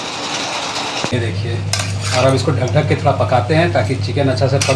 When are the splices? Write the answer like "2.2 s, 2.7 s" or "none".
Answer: 1.1 s